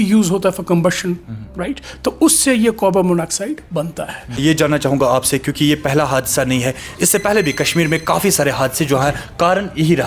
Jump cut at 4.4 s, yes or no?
yes